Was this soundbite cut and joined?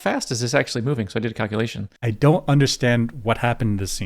yes; 1 cut; at 1.9 s

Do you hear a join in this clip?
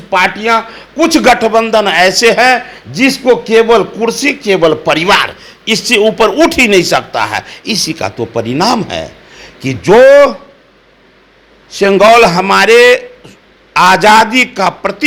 no; 0 cuts

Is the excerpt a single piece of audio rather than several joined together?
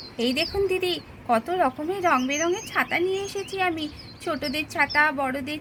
yes; 0 cuts

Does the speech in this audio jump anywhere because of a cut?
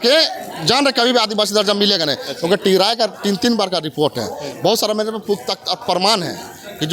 no; 0 cuts

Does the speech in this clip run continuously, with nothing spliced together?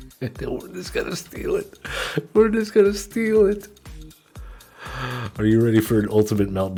yes; 0 cuts

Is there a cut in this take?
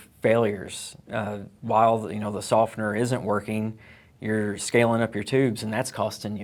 no; 0 cuts

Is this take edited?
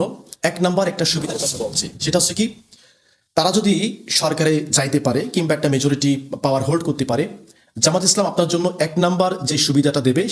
no; 0 cuts

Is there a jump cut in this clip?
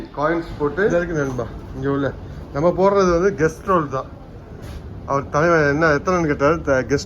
yes; 1 cut; at 0.9 s

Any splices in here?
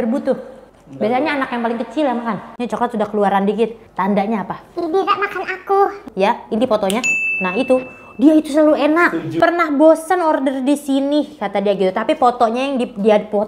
yes; 3 cuts; at 2.5 s, 6.0 s, 9.4 s

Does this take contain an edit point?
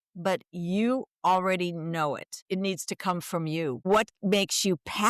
yes; 2 cuts; at 2.3 s, 3.8 s

